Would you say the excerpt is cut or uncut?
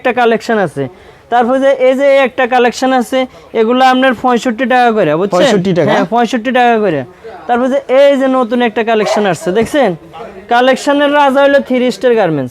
uncut